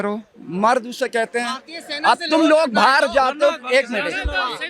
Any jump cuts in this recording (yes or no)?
no